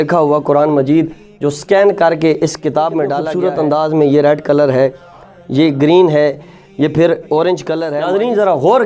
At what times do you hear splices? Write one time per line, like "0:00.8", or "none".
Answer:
0:03.3
0:07.8